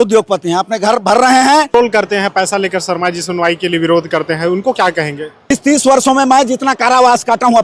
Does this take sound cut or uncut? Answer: cut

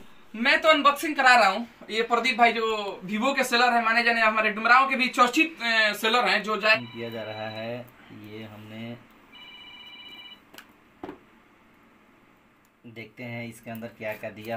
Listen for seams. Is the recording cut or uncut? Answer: cut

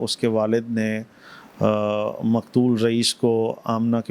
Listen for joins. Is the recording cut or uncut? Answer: uncut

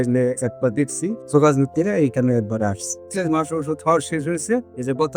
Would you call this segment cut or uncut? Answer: cut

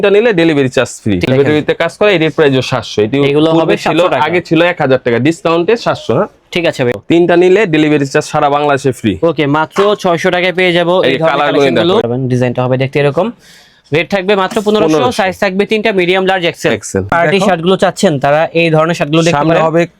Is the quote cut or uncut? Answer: cut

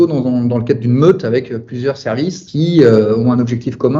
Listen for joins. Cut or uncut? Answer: cut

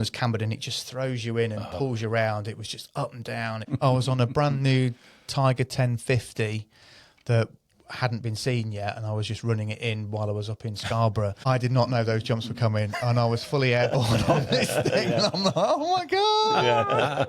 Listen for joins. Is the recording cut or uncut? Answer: cut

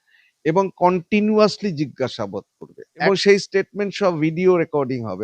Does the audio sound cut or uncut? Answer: cut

